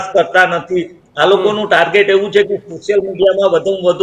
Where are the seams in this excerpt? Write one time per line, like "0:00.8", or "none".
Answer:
0:01.0